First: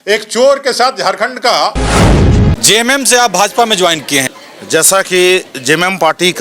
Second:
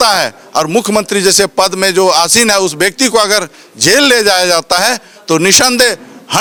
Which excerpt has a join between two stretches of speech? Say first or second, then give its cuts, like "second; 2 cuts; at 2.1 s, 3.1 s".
first; 2 cuts; at 2.2 s, 4.3 s